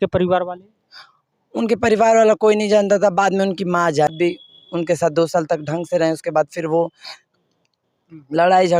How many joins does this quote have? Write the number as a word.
one